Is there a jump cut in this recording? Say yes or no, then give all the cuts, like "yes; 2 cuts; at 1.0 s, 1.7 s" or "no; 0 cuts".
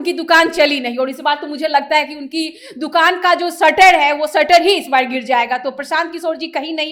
no; 0 cuts